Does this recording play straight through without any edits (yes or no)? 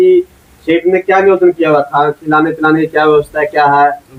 yes